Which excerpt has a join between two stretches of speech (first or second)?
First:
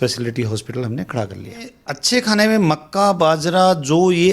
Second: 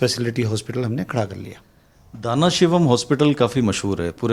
first